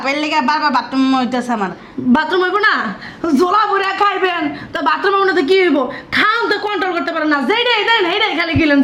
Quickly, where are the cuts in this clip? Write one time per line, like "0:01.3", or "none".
none